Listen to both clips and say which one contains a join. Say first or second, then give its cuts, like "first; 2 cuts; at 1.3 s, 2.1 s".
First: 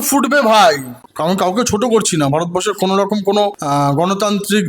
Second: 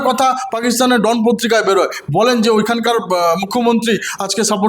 first; 2 cuts; at 1.1 s, 3.6 s